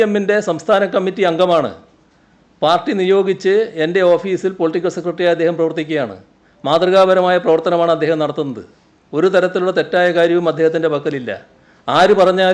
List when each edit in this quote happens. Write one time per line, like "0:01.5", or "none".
none